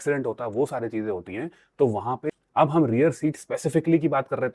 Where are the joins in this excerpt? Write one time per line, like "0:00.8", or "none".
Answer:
0:02.3